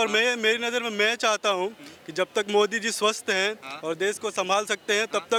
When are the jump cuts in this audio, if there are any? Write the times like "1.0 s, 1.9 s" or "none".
none